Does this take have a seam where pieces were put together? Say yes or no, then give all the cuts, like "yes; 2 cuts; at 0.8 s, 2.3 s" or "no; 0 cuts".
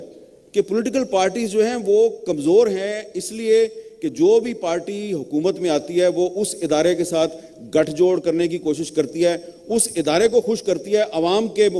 no; 0 cuts